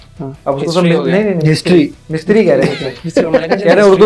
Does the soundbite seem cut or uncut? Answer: uncut